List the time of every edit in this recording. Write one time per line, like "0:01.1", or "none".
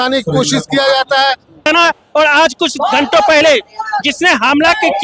0:01.7